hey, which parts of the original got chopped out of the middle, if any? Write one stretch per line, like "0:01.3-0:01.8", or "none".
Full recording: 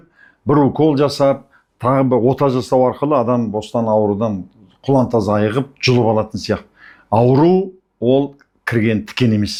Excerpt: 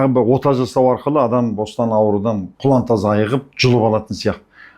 0:04.4-0:04.7